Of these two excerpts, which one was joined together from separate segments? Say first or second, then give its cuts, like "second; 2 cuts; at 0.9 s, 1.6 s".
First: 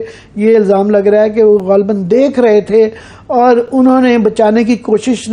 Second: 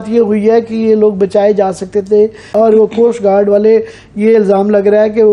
second; 1 cut; at 2.5 s